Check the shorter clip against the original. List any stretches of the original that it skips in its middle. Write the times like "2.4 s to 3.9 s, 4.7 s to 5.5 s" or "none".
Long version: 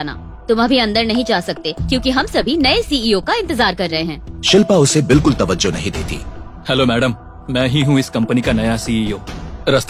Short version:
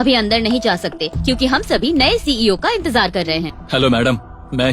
4.2 s to 6.5 s